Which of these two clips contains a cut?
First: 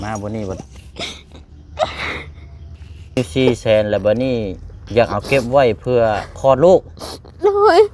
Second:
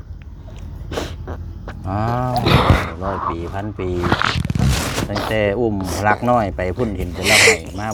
first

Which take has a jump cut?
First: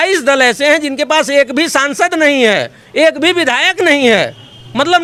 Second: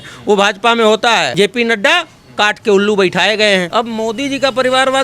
second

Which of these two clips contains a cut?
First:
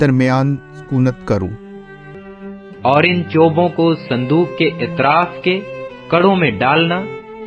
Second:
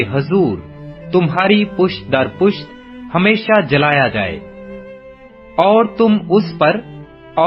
first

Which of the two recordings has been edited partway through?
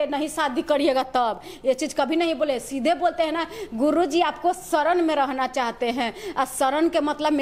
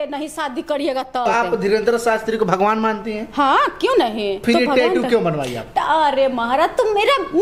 second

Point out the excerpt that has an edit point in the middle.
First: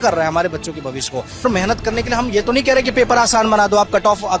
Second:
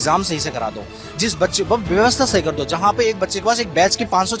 first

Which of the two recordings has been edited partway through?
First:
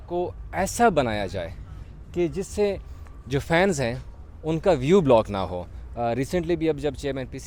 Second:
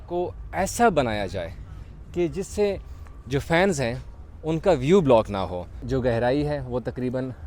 second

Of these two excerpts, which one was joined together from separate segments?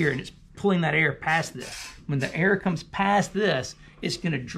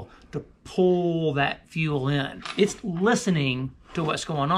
second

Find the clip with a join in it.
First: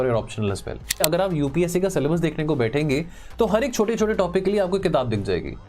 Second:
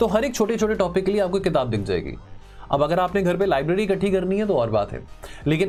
first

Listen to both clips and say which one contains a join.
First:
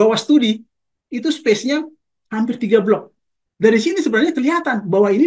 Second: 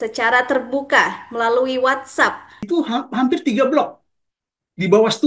second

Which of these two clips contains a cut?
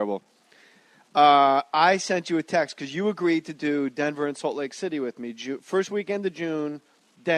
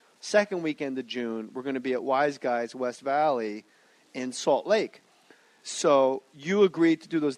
second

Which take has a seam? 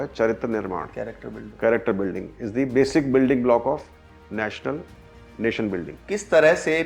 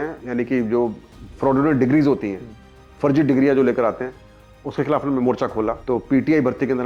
first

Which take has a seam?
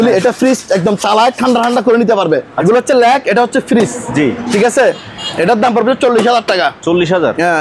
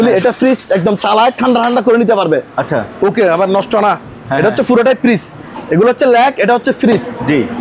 first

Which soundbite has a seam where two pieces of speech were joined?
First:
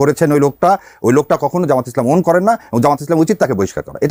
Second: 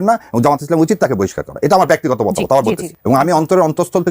second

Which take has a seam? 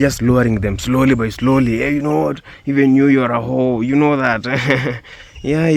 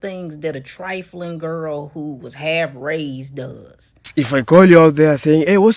second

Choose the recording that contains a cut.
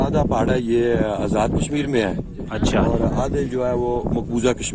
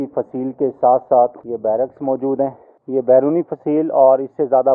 second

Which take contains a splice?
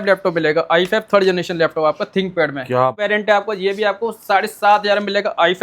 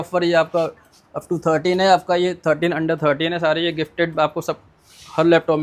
first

